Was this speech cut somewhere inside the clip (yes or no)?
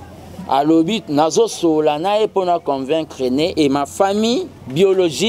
no